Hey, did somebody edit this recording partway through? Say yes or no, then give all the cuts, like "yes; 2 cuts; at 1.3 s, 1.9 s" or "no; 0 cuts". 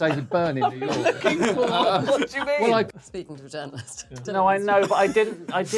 yes; 1 cut; at 2.9 s